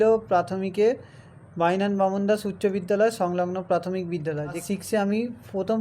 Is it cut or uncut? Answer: cut